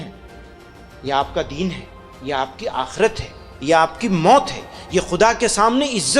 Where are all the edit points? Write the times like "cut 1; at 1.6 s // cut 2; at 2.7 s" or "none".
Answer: none